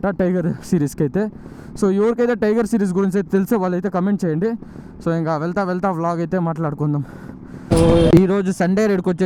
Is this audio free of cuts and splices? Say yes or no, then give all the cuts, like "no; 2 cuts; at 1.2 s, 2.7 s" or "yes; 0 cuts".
yes; 0 cuts